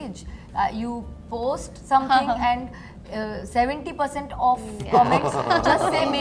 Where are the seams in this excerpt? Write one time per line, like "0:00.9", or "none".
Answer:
none